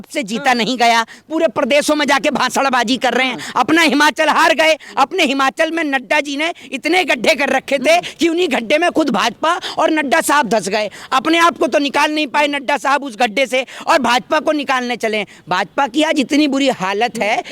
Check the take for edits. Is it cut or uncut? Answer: uncut